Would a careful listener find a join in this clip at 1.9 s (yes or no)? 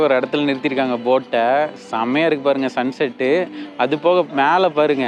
no